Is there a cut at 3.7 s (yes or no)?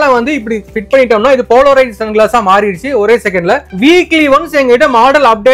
yes